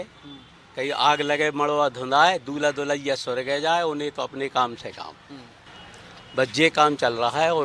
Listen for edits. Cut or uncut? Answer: uncut